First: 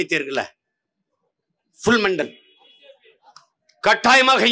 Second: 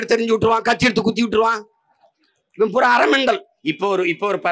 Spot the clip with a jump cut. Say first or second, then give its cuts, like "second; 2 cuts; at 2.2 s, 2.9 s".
second; 1 cut; at 3.5 s